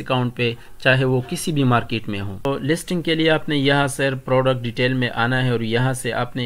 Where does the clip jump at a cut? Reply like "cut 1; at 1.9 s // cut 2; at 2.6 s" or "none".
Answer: cut 1; at 2.4 s